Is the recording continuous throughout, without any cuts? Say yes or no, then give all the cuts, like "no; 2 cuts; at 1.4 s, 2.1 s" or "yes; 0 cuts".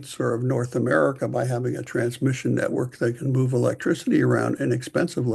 yes; 0 cuts